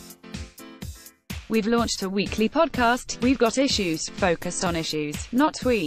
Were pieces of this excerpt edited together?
yes; 1 cut; at 1.4 s

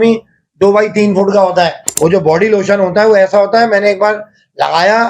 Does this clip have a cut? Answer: yes; 1 cut; at 1.8 s

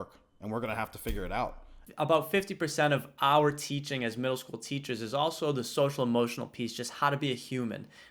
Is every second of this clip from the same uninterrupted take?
no; 1 cut; at 1.8 s

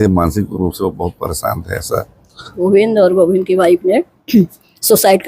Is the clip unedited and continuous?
no; 1 cut; at 2.7 s

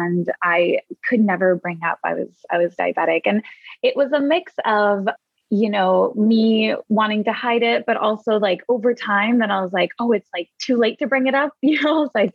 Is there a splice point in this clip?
no; 0 cuts

